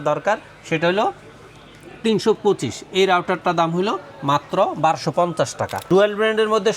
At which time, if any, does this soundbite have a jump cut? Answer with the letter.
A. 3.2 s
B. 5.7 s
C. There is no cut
B